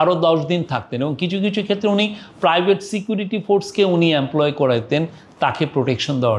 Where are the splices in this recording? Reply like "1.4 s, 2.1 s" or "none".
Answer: none

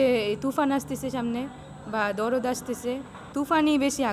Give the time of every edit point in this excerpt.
3.2 s

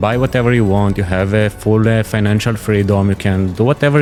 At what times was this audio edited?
none

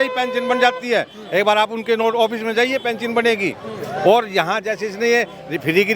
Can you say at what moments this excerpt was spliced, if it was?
none

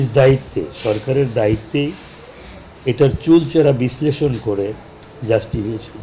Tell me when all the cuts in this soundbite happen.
none

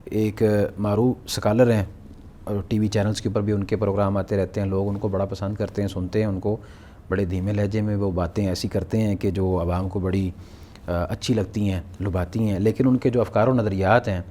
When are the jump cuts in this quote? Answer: none

